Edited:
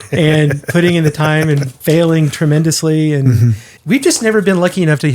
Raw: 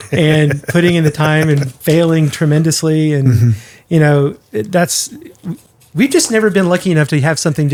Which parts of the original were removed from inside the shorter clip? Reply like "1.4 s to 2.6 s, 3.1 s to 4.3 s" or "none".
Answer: 3.7 s to 5.8 s